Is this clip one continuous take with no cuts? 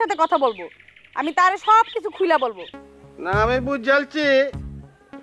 no; 1 cut; at 2.7 s

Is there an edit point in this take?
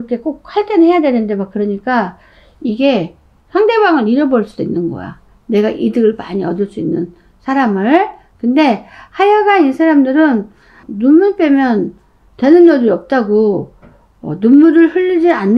no; 0 cuts

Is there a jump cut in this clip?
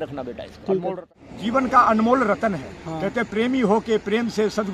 yes; 1 cut; at 1.2 s

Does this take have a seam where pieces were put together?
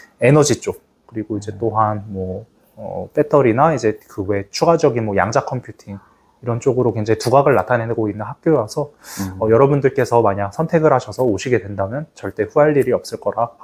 no; 0 cuts

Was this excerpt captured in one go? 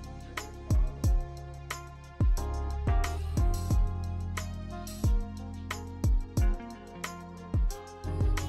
no; 1 cut; at 4.0 s

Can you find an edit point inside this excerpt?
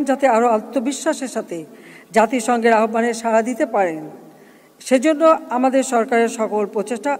no; 0 cuts

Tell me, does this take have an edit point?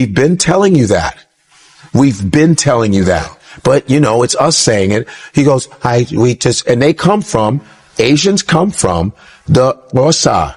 no; 0 cuts

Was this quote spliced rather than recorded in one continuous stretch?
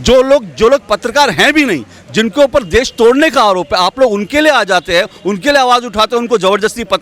no; 0 cuts

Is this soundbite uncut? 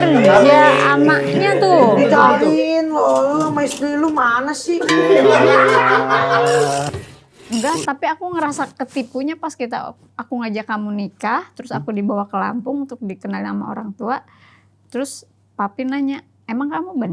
no; 1 cut; at 7.1 s

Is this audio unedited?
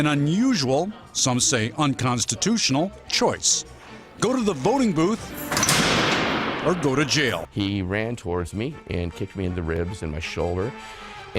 no; 1 cut; at 7.5 s

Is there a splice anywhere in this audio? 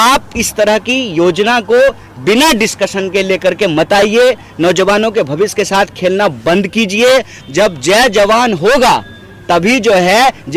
yes; 1 cut; at 7.4 s

